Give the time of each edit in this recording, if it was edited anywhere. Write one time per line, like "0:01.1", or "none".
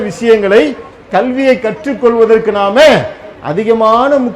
none

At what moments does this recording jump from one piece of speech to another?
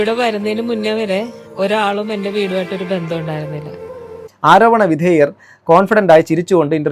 0:04.2

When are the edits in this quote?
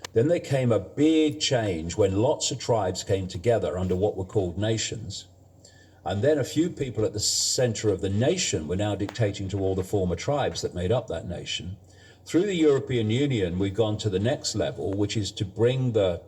0:09.4
0:14.3

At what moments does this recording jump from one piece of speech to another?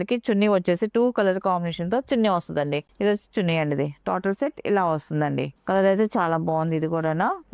none

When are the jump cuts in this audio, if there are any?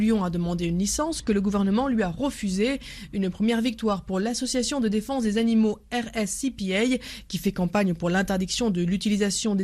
0:03.0

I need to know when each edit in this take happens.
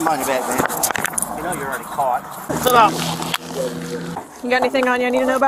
0:02.5
0:04.1

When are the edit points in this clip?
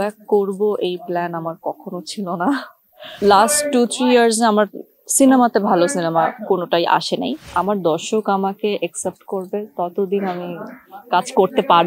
0:03.1
0:07.4

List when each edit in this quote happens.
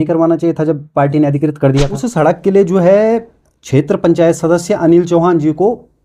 0:02.0

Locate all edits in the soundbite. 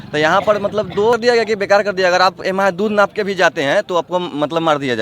0:01.1

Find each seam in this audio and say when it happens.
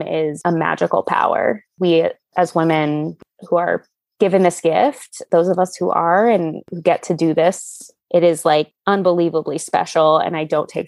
0:01.7
0:03.2
0:06.6
0:07.9

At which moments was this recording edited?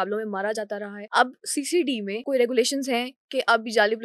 0:01.0
0:02.2

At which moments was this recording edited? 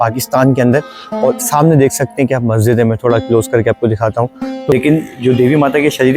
0:04.3

